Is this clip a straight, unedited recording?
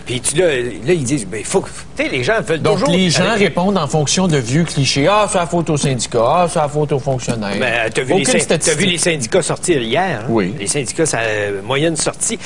yes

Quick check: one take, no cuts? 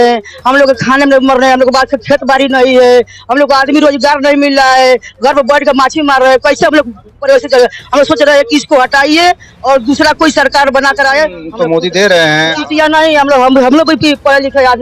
no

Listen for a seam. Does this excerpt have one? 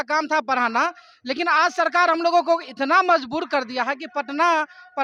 no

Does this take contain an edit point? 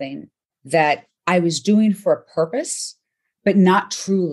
yes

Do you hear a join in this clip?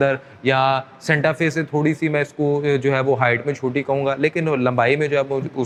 no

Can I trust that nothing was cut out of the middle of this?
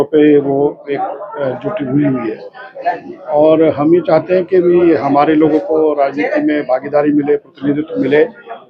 yes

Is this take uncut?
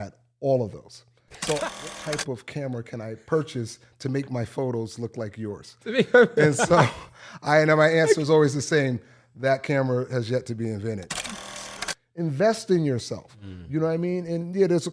no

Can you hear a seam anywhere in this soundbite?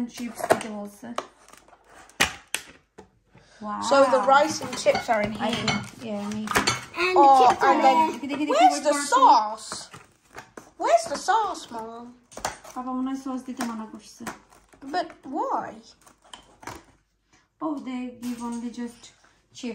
no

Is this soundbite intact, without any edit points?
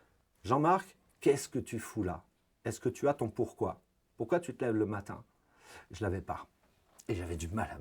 yes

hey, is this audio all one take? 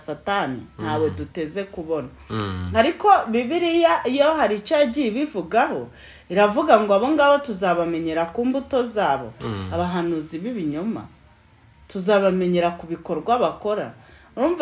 yes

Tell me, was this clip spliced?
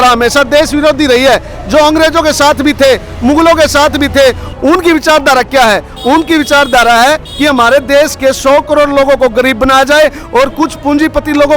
no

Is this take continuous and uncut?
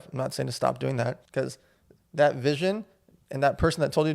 no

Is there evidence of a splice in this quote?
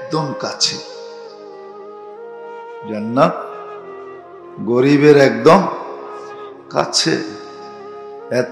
no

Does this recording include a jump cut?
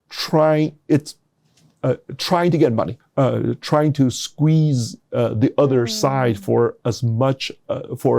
yes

